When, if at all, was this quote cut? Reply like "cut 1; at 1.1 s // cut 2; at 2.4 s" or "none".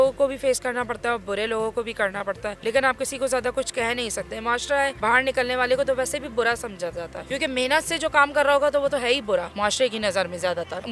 none